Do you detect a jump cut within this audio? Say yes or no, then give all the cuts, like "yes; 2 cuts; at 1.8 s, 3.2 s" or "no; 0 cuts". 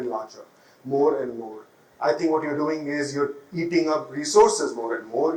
no; 0 cuts